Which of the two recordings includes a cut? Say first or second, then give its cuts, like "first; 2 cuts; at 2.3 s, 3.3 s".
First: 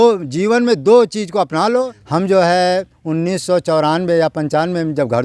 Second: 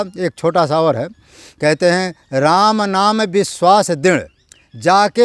first; 1 cut; at 2.0 s